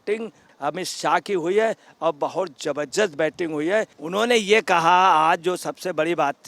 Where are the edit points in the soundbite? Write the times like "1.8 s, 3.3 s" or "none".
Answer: none